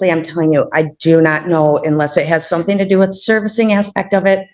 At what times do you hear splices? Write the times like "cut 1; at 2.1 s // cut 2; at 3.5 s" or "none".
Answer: none